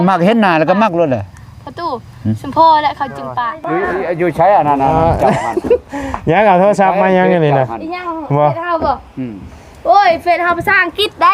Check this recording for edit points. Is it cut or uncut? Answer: cut